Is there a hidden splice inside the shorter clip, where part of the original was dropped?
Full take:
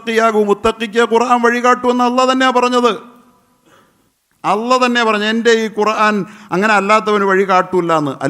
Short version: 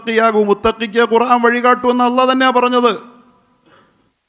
no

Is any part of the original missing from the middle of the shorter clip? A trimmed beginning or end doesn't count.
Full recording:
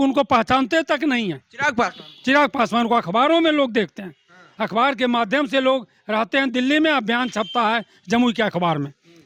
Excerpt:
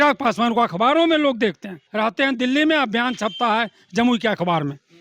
yes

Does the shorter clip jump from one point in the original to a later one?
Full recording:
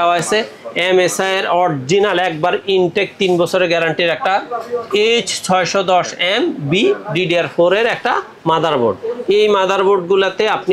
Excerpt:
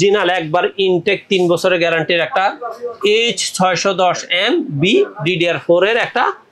no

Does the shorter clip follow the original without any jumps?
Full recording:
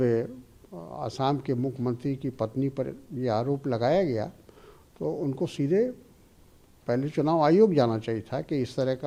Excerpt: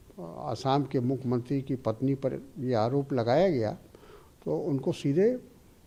yes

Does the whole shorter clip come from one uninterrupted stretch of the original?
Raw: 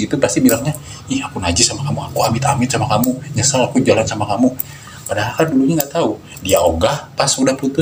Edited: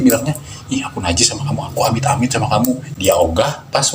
no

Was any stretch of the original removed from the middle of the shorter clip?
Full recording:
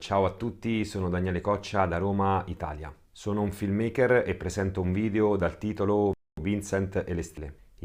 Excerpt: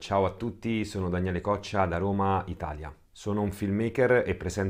no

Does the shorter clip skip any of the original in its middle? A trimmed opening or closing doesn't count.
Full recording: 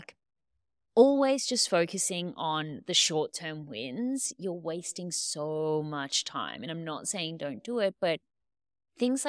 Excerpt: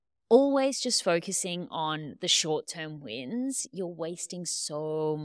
no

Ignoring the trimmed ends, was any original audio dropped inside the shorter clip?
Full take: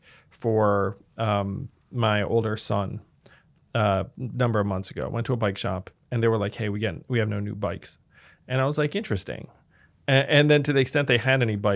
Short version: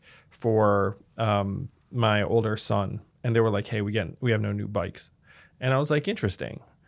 yes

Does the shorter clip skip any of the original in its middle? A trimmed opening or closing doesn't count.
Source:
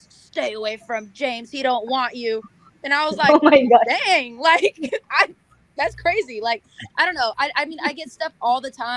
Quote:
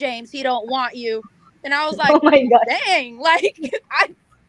no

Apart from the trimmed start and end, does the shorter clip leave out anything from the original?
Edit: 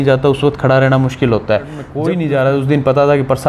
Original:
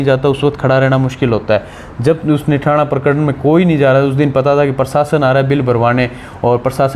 yes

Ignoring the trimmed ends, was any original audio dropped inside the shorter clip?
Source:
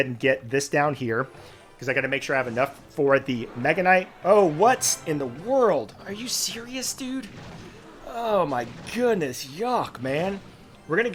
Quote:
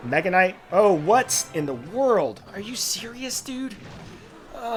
no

